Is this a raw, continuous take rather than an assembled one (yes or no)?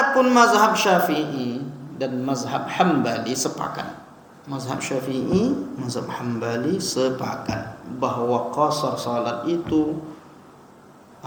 yes